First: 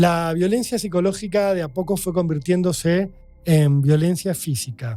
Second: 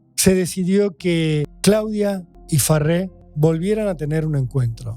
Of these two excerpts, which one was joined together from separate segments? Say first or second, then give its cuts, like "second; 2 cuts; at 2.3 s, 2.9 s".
second; 3 cuts; at 1.5 s, 2.3 s, 3.2 s